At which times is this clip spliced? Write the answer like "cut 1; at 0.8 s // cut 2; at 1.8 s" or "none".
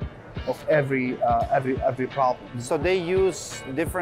cut 1; at 2.6 s